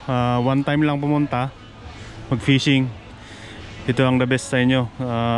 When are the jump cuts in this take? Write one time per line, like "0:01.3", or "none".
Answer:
0:03.1

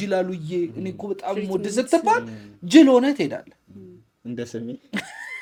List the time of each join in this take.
none

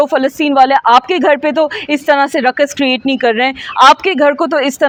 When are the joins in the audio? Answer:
none

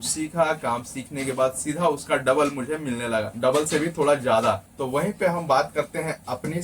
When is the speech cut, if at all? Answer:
0:03.3
0:04.6

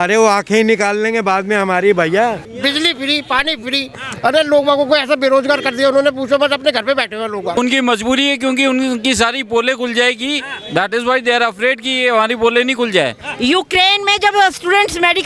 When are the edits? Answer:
0:02.5
0:07.6
0:13.2

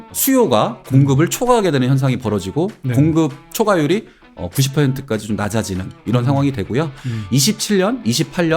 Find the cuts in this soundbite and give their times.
none

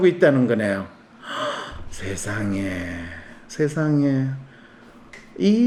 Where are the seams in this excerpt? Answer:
none

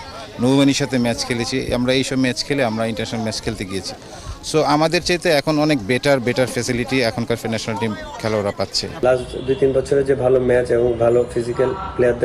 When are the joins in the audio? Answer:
none

